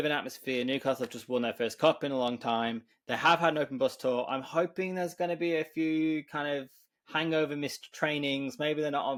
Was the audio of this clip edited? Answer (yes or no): no